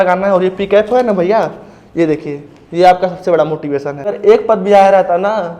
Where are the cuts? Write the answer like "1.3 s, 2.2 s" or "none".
4.1 s